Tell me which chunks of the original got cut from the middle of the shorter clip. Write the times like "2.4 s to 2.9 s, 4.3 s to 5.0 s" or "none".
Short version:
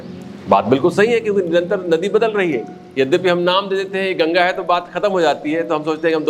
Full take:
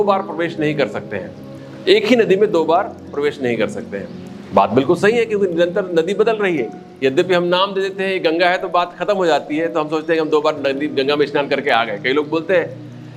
none